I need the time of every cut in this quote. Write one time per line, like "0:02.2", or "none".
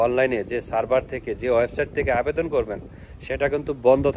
none